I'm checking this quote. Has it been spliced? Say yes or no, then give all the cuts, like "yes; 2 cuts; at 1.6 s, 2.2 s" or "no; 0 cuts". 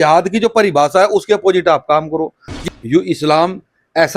yes; 1 cut; at 2.5 s